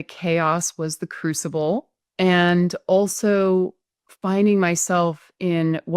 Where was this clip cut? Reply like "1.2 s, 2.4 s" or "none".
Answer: 2.0 s